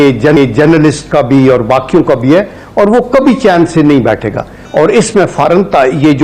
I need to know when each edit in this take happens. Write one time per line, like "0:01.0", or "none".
0:04.6